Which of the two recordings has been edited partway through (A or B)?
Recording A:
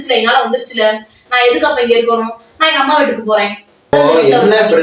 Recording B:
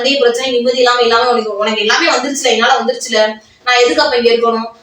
A